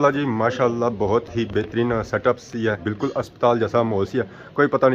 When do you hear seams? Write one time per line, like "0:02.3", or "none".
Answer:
0:02.8